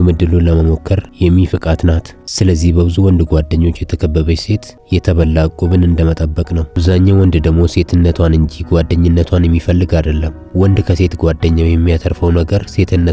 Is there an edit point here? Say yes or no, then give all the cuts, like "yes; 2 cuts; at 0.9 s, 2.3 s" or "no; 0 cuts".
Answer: yes; 3 cuts; at 2.2 s, 4.7 s, 6.8 s